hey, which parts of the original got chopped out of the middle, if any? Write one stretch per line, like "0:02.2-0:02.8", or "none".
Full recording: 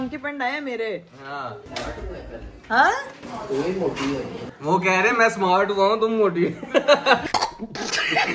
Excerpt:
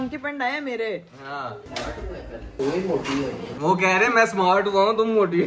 0:02.5-0:03.4
0:04.4-0:04.5